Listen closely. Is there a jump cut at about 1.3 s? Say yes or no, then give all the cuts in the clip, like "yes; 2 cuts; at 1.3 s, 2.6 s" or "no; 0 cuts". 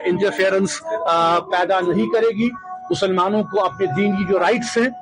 no; 0 cuts